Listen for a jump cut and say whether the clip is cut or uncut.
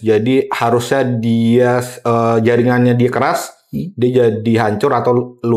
uncut